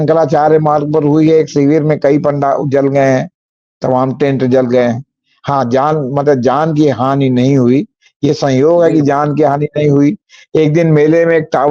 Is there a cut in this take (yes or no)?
no